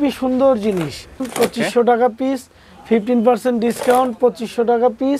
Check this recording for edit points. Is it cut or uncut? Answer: cut